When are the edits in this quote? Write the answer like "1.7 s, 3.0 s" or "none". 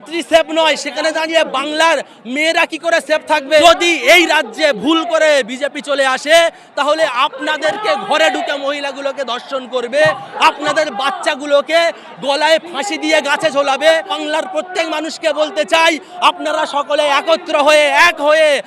3.6 s, 14.2 s